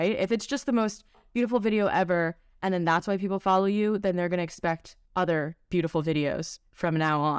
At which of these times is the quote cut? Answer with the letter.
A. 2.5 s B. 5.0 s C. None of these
B